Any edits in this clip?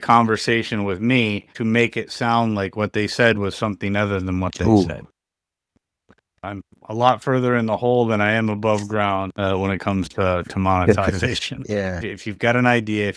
yes; 2 cuts; at 6.4 s, 12.0 s

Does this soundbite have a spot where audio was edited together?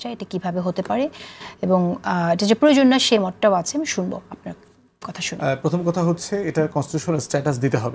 no; 0 cuts

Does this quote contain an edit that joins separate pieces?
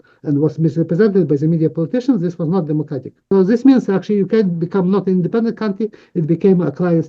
yes; 1 cut; at 3.2 s

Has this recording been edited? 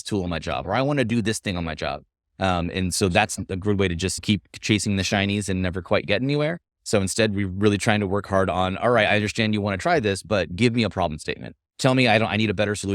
yes; 1 cut; at 4.2 s

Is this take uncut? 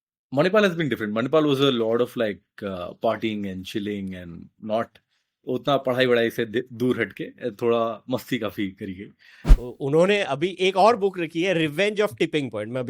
no; 1 cut; at 9.5 s

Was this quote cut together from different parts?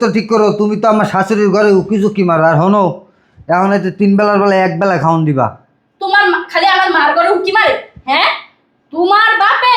no; 0 cuts

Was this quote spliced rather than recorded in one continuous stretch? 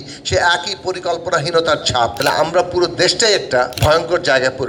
yes; 2 cuts; at 2.2 s, 3.7 s

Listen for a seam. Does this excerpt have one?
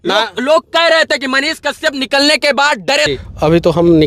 yes; 1 cut; at 3.1 s

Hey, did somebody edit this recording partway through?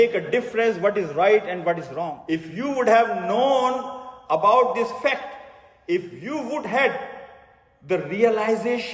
yes; 1 cut; at 2.2 s

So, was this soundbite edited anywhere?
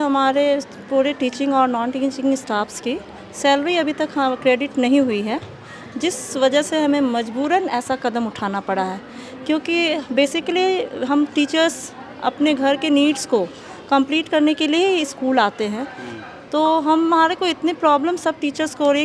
no; 0 cuts

